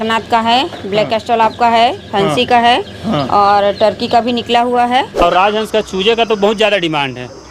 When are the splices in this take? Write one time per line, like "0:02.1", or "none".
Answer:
0:05.2